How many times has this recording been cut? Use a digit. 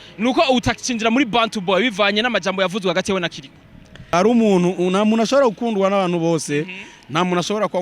1